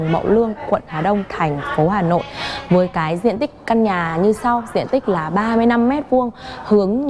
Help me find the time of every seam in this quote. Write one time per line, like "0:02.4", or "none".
none